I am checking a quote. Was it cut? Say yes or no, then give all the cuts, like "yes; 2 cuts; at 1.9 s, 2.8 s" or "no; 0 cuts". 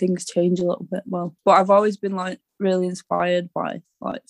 yes; 1 cut; at 1.3 s